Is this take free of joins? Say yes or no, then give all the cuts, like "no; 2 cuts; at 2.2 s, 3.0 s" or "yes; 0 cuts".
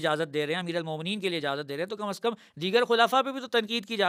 yes; 0 cuts